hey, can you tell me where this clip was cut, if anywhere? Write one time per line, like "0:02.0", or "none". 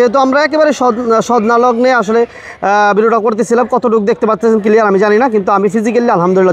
none